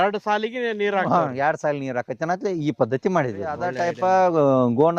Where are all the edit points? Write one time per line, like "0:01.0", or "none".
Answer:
0:03.7